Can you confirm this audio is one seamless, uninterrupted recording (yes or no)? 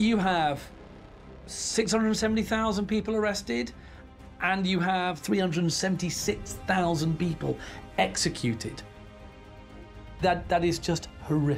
no